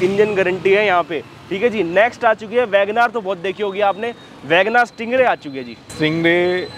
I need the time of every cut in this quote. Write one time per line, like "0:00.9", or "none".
none